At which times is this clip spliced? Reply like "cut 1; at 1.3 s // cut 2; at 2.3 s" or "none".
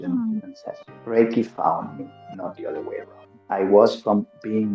cut 1; at 0.9 s // cut 2; at 3.3 s